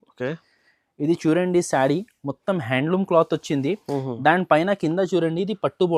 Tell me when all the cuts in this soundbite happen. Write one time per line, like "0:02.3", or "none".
none